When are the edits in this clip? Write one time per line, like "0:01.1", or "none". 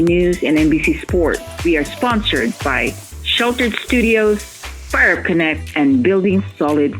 0:01.5